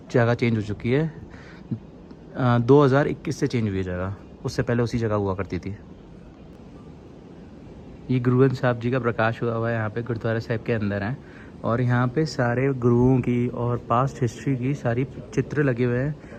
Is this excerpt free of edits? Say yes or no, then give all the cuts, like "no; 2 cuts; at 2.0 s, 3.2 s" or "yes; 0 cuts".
yes; 0 cuts